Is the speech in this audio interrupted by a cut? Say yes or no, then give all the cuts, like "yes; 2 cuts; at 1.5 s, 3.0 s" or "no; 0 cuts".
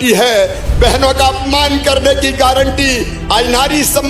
no; 0 cuts